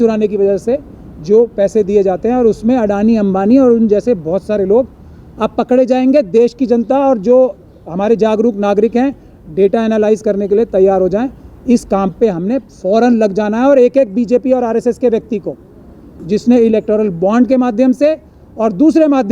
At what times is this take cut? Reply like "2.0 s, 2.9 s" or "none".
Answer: none